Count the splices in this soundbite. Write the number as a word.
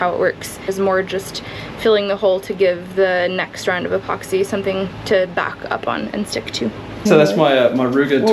two